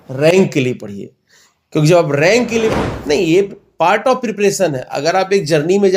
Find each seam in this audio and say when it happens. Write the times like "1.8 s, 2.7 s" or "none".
2.7 s